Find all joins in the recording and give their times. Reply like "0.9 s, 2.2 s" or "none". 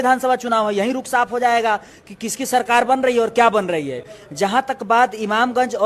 none